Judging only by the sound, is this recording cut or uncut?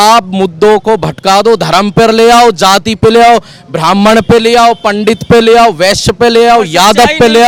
uncut